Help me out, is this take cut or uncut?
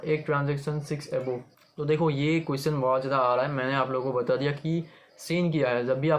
cut